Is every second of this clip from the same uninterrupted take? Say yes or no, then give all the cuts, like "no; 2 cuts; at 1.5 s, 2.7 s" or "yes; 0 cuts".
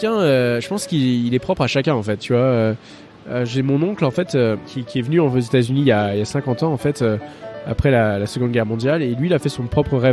no; 1 cut; at 4.7 s